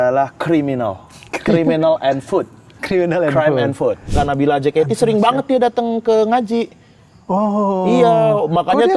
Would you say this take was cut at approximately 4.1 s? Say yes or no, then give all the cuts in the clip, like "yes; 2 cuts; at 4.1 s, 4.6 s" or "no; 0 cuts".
yes; 1 cut; at 4.1 s